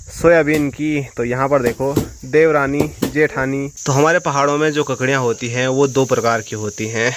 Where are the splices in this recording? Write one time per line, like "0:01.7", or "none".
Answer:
0:03.7